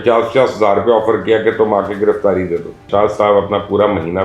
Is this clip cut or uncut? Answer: cut